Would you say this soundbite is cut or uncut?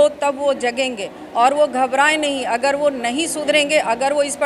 uncut